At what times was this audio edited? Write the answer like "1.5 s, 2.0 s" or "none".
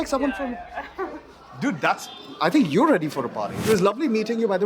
3.5 s